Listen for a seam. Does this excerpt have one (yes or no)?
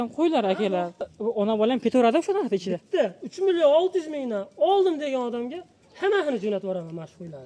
yes